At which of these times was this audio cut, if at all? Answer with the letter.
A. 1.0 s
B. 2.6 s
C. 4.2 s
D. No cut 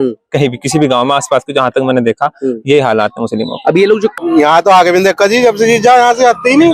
C